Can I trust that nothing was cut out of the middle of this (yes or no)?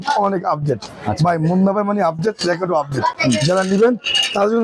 yes